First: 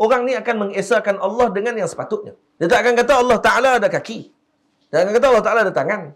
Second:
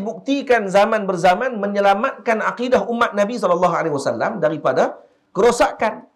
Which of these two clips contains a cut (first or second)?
first